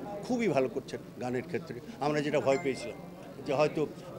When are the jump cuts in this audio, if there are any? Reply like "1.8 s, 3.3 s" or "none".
none